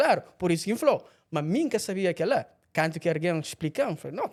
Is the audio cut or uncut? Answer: uncut